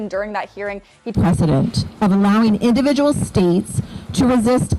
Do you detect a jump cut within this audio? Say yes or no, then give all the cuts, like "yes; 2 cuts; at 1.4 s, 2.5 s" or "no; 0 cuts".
no; 0 cuts